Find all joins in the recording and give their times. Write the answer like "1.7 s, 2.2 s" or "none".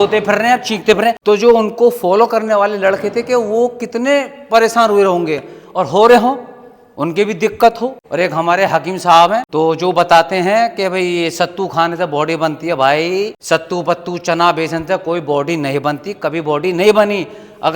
1.2 s, 8.0 s, 9.5 s, 13.4 s